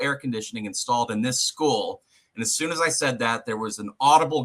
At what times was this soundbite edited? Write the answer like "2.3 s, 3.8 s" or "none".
none